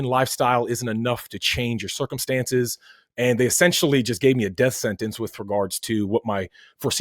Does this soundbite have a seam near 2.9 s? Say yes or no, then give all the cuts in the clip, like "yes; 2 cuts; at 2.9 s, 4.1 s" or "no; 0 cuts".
no; 0 cuts